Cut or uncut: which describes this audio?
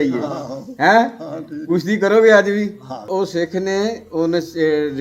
cut